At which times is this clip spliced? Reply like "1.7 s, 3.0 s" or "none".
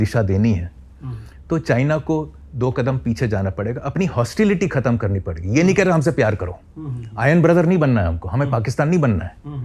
none